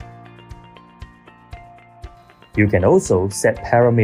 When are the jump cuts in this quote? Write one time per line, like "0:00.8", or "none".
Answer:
0:01.5

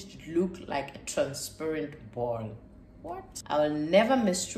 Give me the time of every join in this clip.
0:03.3

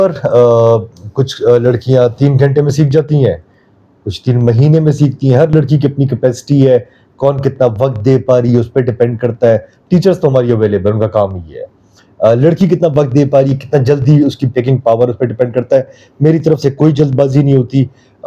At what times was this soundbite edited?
none

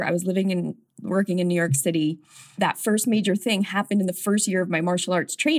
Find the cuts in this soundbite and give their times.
0:02.4

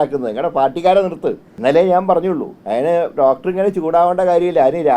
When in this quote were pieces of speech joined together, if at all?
0:01.5
0:02.5

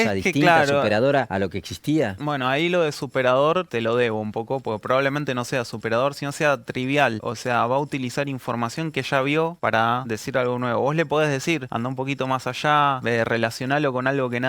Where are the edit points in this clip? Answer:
0:01.3
0:02.2
0:03.7
0:07.3
0:09.8
0:11.7
0:13.0

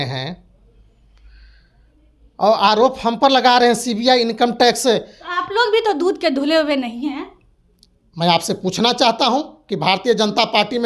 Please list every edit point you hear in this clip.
none

